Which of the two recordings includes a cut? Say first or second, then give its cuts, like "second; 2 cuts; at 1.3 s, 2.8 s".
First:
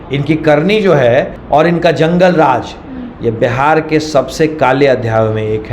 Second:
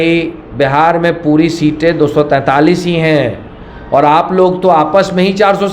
first; 1 cut; at 1.4 s